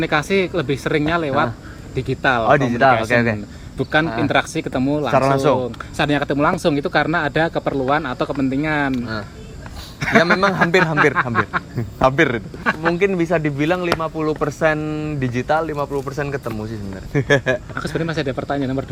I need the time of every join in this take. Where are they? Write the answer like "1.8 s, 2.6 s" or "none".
none